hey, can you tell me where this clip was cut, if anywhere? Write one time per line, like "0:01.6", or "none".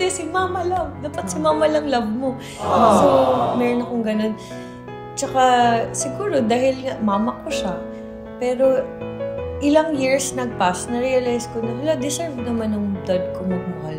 none